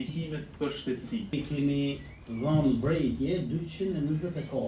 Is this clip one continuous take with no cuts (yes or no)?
no